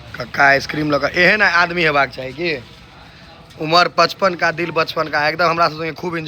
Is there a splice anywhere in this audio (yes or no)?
no